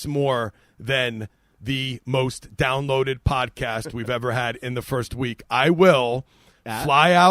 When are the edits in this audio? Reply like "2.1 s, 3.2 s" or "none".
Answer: none